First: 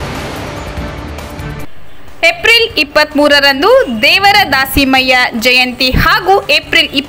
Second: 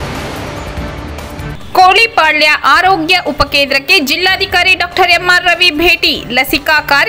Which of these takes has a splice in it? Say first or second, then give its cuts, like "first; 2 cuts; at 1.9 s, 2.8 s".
first; 1 cut; at 1.5 s